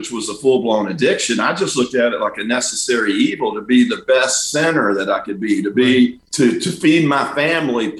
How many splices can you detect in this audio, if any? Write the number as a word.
one